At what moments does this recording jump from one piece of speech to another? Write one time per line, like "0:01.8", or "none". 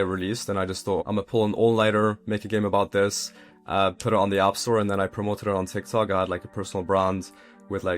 0:01.0